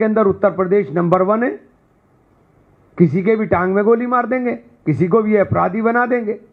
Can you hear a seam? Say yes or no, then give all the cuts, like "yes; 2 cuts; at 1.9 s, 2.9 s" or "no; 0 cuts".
no; 0 cuts